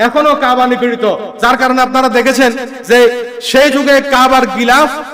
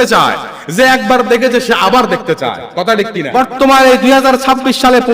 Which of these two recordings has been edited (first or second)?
second